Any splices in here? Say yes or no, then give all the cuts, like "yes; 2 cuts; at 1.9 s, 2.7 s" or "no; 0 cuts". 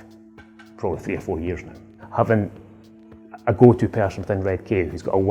yes; 1 cut; at 2.0 s